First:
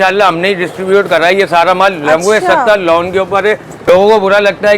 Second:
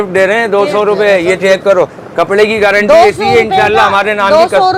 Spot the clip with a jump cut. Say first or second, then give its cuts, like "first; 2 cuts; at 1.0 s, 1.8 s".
first; 1 cut; at 3.7 s